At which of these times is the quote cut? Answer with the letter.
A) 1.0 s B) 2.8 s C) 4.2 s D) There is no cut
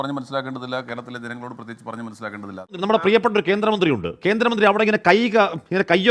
B